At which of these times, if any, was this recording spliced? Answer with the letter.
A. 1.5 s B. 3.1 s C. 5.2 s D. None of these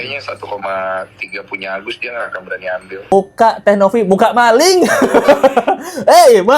B